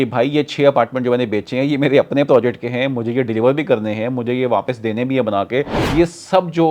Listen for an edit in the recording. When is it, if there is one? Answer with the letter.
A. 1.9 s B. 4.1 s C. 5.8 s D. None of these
C